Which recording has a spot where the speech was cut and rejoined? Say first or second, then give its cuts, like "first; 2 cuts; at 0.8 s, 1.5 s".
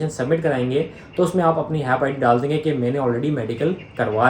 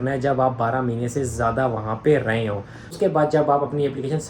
second; 1 cut; at 2.9 s